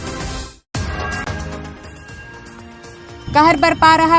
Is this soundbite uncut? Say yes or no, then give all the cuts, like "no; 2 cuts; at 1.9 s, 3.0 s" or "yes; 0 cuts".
no; 1 cut; at 1.6 s